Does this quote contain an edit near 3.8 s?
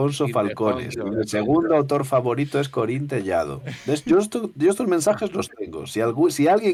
no; 0 cuts

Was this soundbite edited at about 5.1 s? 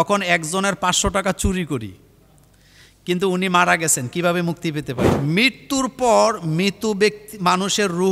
yes; 1 cut; at 5.1 s

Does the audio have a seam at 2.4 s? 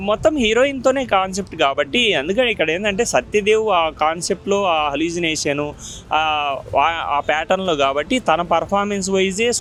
no; 0 cuts

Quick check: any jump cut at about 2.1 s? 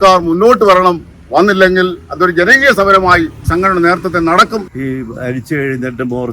no; 2 cuts; at 3.4 s, 4.6 s

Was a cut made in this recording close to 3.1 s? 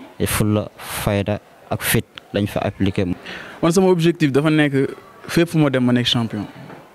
yes; 1 cut; at 3.1 s

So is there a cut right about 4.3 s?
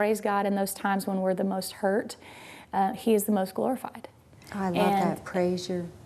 no; 0 cuts

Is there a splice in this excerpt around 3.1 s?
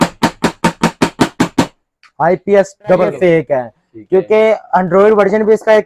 yes; 1 cut; at 3.1 s

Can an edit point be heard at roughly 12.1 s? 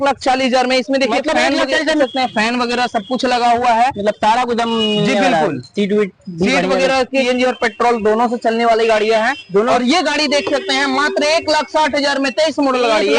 no; 2 cuts; at 2.0 s, 7.3 s

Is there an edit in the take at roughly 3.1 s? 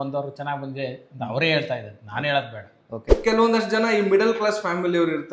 yes; 1 cut; at 3.1 s

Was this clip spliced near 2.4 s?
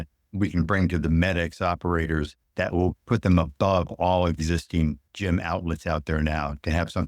yes; 2 cuts; at 2.4 s, 5.1 s

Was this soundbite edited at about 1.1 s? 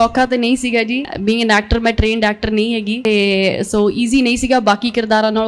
yes; 2 cuts; at 1.1 s, 3.0 s

